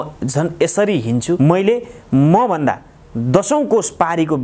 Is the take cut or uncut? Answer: cut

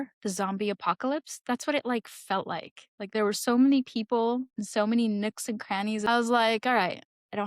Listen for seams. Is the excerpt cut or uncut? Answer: cut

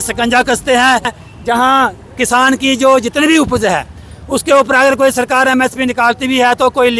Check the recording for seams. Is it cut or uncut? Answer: cut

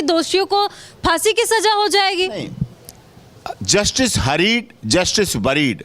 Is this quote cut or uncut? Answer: uncut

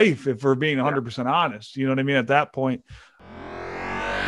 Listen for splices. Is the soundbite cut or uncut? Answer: cut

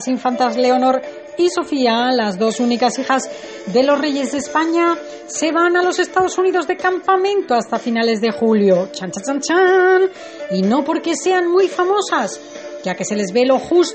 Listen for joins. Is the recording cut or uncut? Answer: uncut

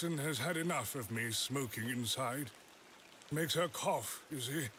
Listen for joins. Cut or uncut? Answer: uncut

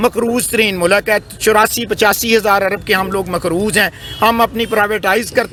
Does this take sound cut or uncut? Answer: uncut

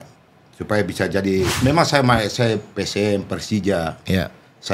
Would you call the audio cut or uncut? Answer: cut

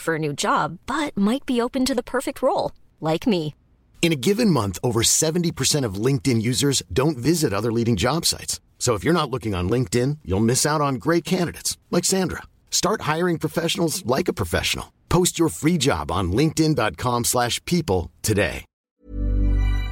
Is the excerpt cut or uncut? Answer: cut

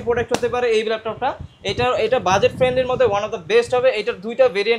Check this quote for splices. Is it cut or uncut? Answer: uncut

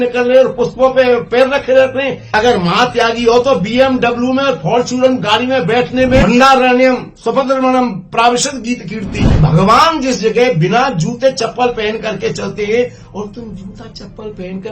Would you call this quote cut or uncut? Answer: cut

